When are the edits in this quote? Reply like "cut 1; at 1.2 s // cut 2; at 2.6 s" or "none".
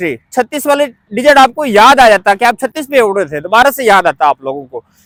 none